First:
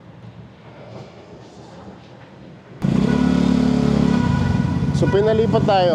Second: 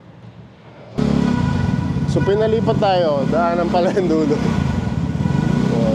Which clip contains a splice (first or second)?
second